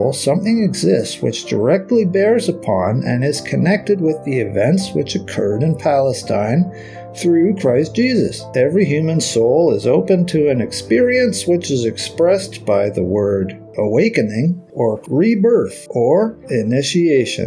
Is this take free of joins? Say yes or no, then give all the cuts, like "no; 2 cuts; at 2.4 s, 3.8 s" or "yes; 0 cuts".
no; 5 cuts; at 8.5 s, 13.7 s, 15.0 s, 15.8 s, 16.4 s